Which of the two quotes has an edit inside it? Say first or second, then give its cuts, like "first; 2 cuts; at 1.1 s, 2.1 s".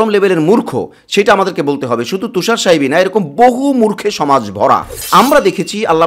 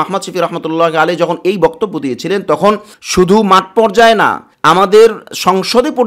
first; 1 cut; at 5.1 s